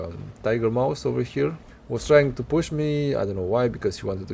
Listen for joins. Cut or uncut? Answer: cut